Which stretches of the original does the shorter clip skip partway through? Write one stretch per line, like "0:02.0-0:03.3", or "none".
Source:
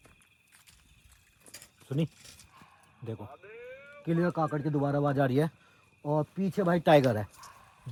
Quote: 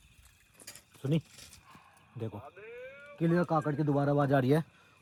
none